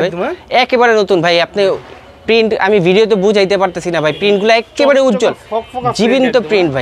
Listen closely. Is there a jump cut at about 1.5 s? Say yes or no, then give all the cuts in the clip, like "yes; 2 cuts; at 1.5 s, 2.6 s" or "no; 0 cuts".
no; 0 cuts